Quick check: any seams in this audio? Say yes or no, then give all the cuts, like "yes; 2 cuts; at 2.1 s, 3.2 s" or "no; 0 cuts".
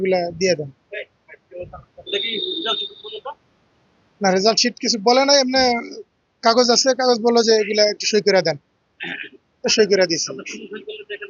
no; 0 cuts